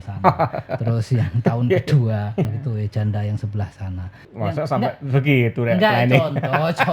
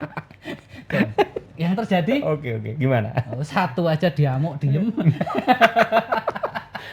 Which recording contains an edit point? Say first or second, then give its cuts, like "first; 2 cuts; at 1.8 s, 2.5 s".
first; 2 cuts; at 2.5 s, 4.3 s